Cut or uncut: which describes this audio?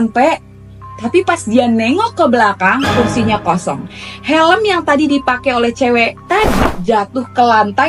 uncut